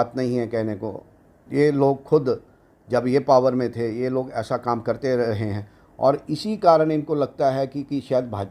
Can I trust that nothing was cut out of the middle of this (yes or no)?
yes